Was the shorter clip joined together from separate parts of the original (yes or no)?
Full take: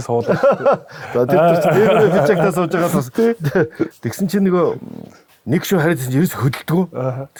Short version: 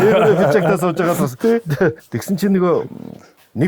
yes